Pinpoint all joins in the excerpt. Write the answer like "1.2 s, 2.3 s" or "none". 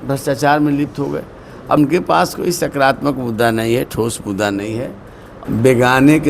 1.8 s, 5.3 s